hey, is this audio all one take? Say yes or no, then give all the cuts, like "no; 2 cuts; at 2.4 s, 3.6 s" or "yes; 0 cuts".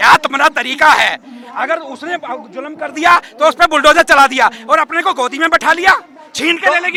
yes; 0 cuts